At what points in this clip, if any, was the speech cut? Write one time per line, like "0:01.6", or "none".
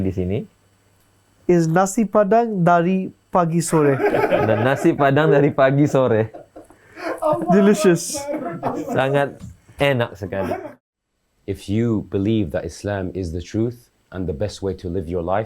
0:10.6